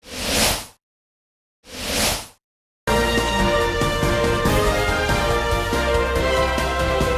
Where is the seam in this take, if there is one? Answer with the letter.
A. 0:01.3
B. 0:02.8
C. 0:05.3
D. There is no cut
A